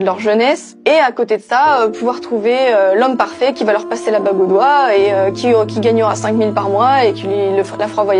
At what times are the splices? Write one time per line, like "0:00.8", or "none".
0:03.6